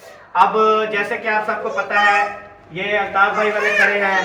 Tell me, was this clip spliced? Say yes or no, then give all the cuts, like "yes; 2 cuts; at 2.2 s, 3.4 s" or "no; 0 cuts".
no; 0 cuts